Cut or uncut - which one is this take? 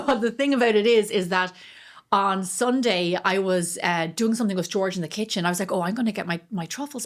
uncut